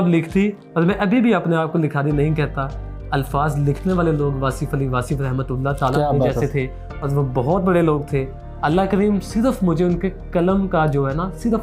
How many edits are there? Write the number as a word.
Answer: zero